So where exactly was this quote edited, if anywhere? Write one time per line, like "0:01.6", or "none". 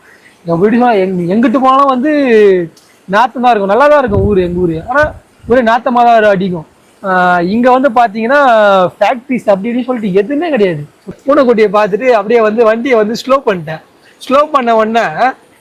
0:11.1